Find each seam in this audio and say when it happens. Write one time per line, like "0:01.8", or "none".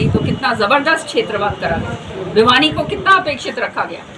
none

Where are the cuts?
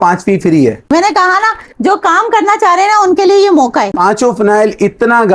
0:00.9
0:03.9

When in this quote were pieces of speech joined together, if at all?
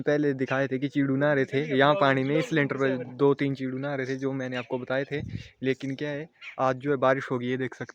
none

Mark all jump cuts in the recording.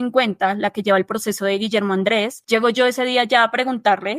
0:02.4

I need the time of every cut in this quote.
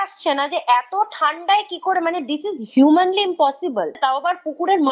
0:04.0

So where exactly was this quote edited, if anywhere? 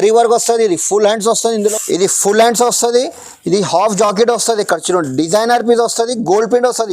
0:01.6

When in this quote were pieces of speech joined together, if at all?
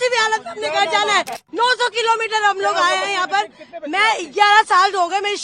0:01.4

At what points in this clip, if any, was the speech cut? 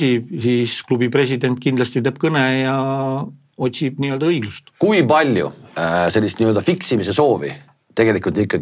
0:04.6

